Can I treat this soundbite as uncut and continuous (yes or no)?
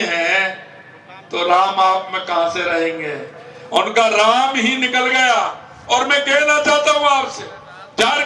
yes